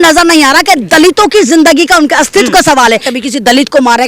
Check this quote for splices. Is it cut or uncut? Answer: cut